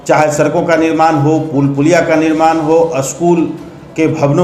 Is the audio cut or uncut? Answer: uncut